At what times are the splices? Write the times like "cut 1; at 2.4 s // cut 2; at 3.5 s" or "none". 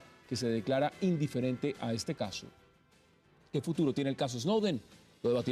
none

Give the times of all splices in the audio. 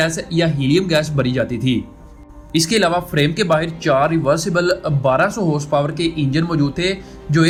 none

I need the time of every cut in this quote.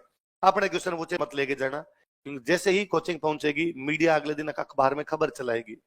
cut 1; at 1.2 s

